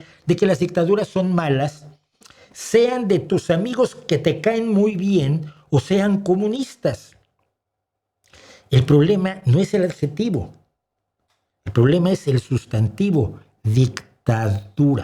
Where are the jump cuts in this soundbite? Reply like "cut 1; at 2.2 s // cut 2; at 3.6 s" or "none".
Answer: none